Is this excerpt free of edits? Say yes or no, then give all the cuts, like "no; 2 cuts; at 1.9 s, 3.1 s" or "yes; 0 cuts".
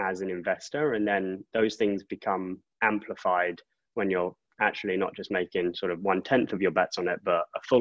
yes; 0 cuts